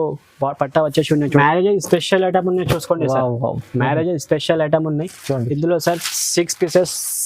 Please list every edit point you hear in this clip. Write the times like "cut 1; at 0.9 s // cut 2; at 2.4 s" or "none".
cut 1; at 1.4 s